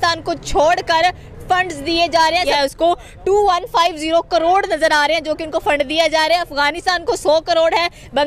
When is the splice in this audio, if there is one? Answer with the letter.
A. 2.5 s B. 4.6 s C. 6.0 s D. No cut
A